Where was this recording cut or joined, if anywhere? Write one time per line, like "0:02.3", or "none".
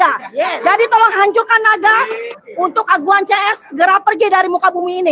0:02.2